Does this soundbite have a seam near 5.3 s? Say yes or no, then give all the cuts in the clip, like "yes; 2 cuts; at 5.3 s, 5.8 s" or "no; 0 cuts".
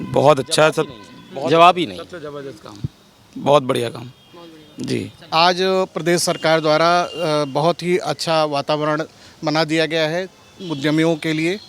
yes; 1 cut; at 5.3 s